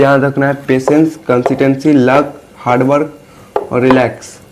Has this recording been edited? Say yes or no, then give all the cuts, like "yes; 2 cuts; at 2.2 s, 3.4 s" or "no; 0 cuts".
no; 0 cuts